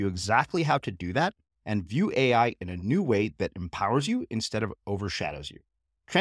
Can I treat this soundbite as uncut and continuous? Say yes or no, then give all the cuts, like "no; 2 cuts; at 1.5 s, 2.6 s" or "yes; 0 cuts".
yes; 0 cuts